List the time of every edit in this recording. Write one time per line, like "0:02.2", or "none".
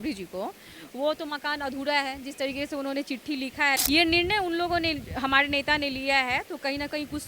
0:03.8

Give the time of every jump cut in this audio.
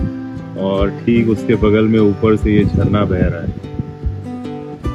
none

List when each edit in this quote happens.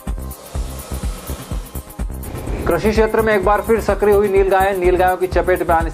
0:02.0

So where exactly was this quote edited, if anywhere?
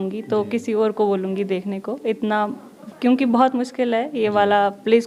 none

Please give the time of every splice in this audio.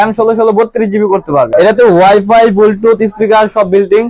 0:01.5

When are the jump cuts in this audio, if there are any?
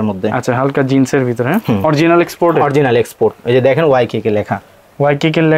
0:01.8

